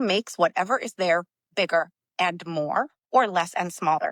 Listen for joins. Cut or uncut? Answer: uncut